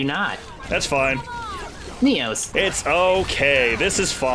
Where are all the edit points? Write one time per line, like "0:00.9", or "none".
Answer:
0:02.4